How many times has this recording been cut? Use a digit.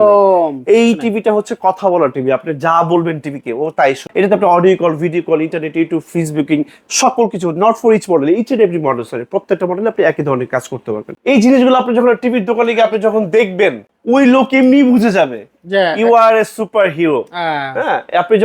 3